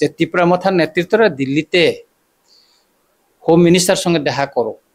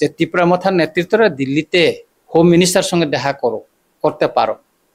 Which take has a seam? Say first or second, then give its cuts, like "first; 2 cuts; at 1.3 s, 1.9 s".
second; 1 cut; at 2.1 s